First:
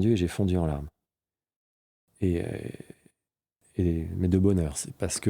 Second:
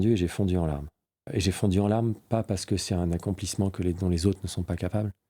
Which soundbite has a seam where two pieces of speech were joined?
second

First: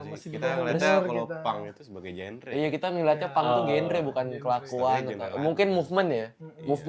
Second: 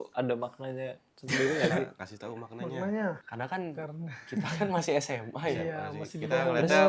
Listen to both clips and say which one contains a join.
second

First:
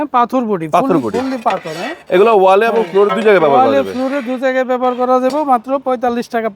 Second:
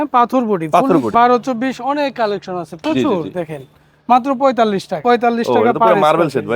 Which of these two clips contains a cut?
second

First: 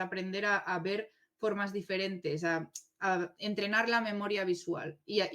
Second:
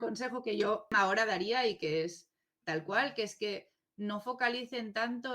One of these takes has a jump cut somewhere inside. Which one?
second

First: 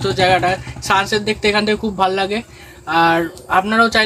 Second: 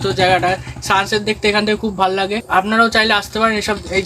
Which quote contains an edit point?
second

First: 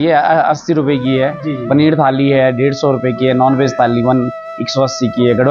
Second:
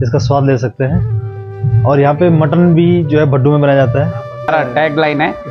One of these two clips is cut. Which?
second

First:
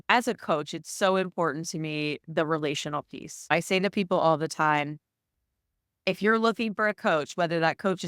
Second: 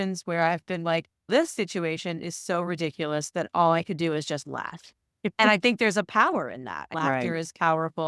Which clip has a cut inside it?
second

